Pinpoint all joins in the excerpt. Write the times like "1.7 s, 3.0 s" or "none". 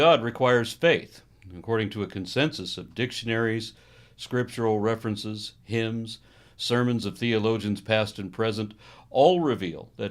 8.7 s